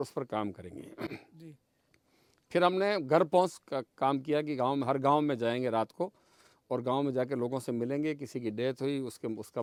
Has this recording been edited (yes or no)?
no